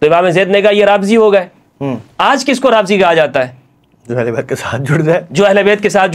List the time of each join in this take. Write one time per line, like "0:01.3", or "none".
none